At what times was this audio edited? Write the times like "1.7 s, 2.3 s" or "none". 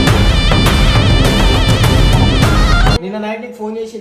3.0 s